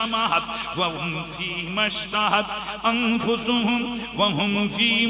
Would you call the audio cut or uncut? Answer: uncut